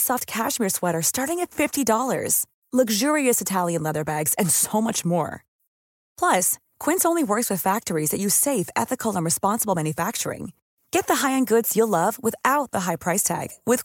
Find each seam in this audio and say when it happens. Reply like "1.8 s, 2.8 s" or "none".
none